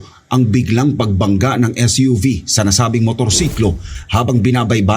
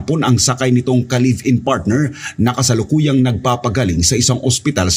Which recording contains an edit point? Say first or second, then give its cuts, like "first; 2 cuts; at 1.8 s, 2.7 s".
first; 1 cut; at 3.9 s